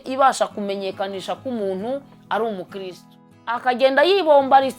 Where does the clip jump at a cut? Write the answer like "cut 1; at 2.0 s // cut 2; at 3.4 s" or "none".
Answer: cut 1; at 3.6 s